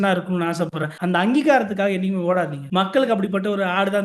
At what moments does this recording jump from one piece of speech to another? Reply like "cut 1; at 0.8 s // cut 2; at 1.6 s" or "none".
cut 1; at 0.9 s // cut 2; at 2.6 s